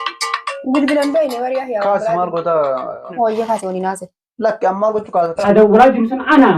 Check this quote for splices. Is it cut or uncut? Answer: cut